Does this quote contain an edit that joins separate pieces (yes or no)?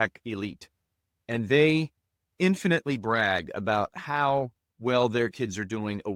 no